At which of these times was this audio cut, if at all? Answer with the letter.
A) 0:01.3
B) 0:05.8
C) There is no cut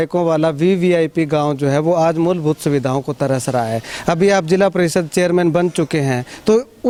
C